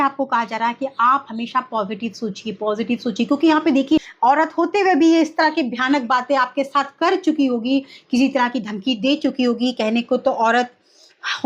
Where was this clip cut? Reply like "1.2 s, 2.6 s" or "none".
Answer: 4.1 s